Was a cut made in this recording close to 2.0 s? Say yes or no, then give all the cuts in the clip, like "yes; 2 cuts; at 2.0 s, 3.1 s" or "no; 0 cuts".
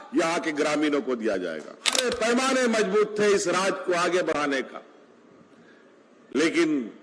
yes; 1 cut; at 2.0 s